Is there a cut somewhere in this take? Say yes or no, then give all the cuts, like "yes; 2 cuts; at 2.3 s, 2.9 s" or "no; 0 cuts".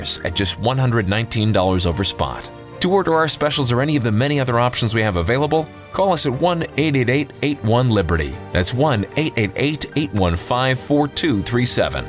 no; 0 cuts